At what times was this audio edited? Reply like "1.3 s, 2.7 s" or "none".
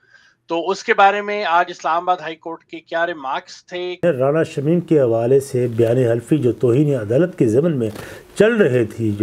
4.0 s